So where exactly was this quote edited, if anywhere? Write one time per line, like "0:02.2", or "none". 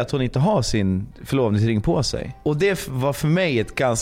0:01.1
0:02.3

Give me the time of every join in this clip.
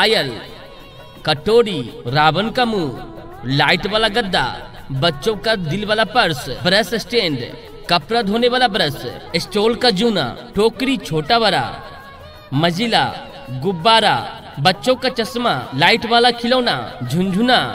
none

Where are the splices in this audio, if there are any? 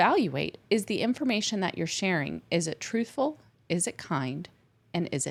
none

